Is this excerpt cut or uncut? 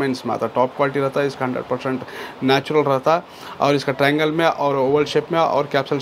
uncut